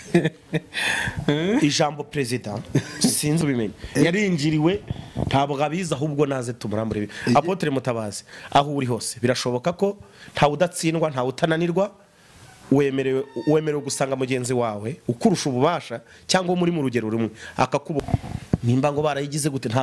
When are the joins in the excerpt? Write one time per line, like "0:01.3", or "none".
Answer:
0:03.4
0:18.0